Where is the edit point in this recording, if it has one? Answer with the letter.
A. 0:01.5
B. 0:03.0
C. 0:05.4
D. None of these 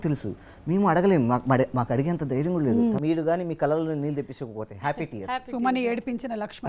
B